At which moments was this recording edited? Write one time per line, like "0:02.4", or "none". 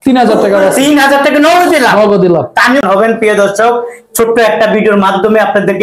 0:02.8